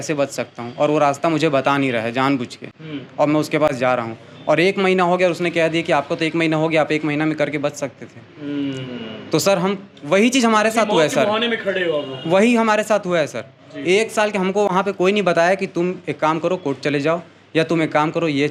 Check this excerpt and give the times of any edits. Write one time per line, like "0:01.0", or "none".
none